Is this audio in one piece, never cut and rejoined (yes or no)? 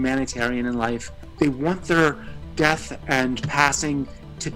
no